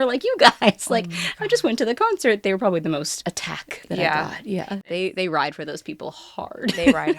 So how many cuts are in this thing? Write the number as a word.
one